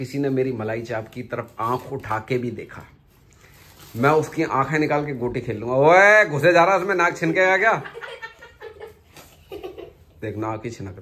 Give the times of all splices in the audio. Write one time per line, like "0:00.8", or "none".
none